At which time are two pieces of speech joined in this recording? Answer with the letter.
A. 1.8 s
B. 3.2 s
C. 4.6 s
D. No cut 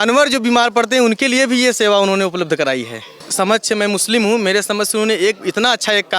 B